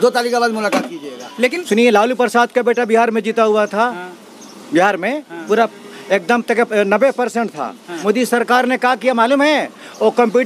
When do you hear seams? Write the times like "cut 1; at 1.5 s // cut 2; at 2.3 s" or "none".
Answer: cut 1; at 1.6 s // cut 2; at 7.9 s